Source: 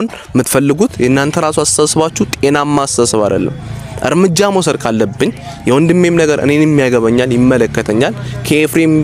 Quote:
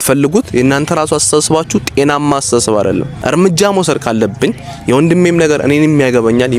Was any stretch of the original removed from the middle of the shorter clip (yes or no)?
yes